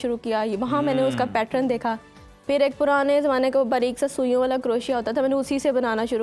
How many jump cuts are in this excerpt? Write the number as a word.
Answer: zero